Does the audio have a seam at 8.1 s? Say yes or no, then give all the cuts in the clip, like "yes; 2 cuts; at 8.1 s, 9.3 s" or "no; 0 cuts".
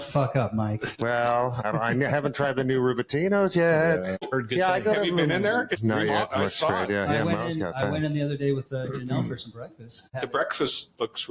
no; 5 cuts; at 0.9 s, 1.6 s, 4.3 s, 5.7 s, 10.1 s